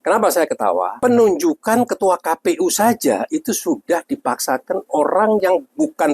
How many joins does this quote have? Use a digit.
1